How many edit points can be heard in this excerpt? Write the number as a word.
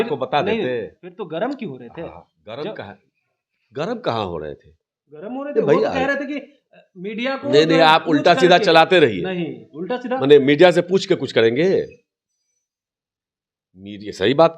zero